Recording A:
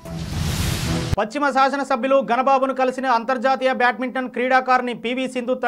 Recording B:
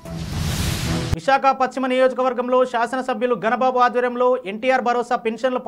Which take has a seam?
A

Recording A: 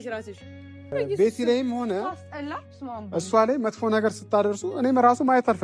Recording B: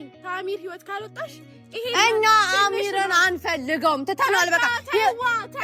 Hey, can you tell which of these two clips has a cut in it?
A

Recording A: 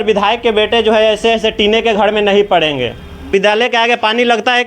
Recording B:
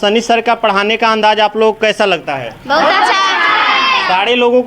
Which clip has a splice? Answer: A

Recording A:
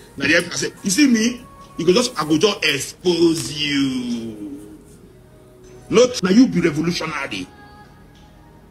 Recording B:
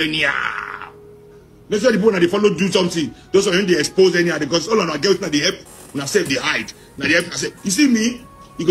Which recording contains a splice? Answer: A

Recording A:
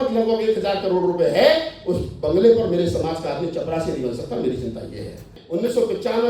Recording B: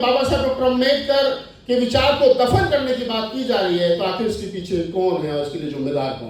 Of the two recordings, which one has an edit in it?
A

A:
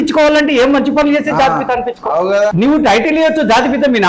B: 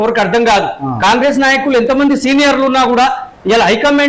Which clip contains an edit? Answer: A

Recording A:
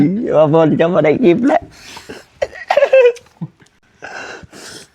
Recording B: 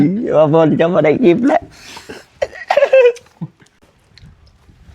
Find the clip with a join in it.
B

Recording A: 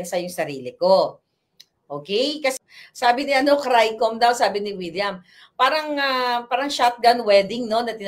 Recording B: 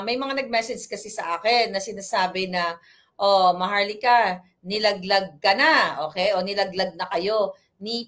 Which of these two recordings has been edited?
A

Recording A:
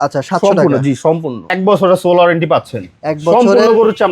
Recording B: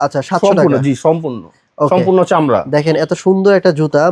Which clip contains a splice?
A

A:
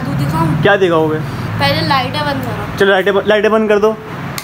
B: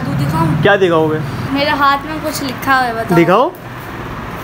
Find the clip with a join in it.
B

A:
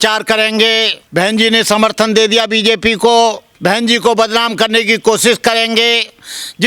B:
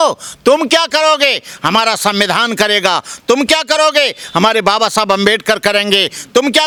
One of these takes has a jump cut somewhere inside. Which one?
A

